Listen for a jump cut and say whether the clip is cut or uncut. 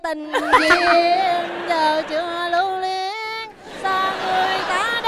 uncut